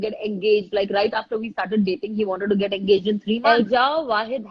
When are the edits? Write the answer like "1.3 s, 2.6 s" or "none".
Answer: 3.4 s